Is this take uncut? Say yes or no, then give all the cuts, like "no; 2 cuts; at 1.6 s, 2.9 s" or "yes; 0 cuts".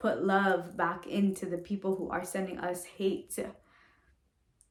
yes; 0 cuts